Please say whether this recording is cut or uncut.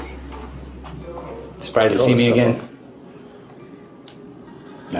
uncut